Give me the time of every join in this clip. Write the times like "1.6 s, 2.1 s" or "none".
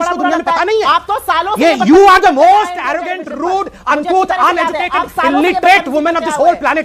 none